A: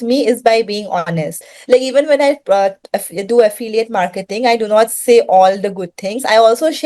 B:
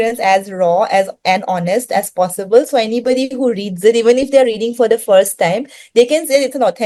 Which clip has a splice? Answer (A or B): A